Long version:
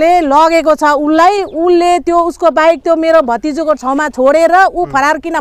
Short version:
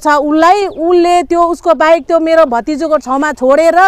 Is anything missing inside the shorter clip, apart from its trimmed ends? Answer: no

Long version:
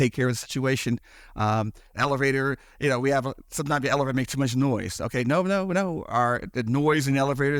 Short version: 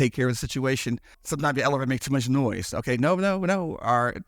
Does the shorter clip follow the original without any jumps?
no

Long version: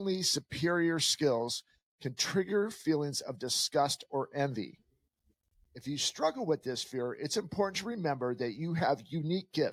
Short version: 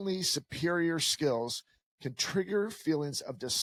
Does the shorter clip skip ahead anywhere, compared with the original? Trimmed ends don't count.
no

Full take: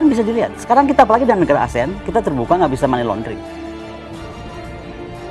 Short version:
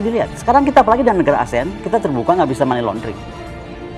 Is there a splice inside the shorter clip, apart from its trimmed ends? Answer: yes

